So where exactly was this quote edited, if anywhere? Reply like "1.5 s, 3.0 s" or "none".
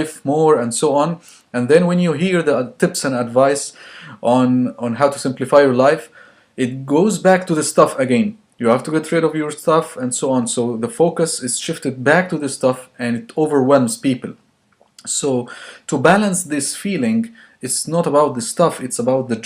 13.8 s